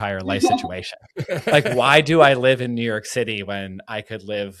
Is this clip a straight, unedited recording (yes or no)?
yes